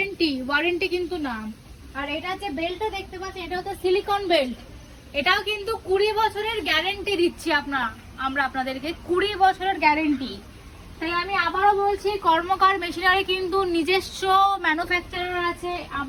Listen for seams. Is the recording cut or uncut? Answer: uncut